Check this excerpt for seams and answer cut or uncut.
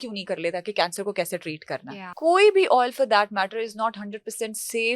cut